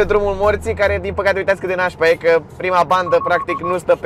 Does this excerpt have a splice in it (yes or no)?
no